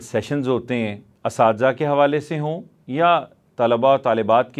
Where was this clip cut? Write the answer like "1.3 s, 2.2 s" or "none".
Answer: 1.1 s

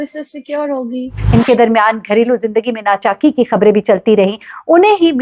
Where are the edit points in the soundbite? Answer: 1.1 s

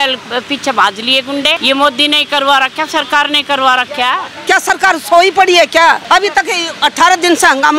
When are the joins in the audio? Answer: 1.6 s, 4.3 s, 6.0 s

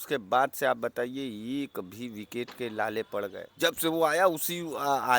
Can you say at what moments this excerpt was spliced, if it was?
3.4 s

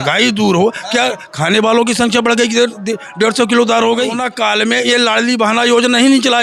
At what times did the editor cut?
4.2 s

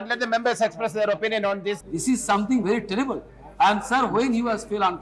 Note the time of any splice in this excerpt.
none

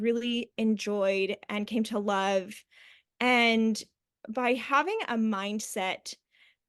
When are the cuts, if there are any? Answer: none

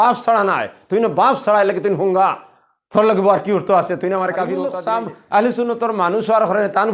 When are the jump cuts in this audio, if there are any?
4.7 s

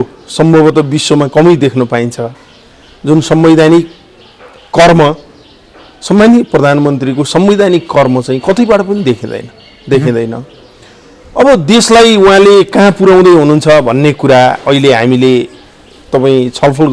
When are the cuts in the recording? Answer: none

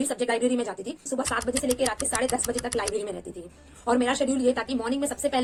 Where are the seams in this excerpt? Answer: none

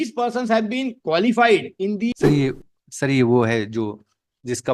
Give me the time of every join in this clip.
2.1 s

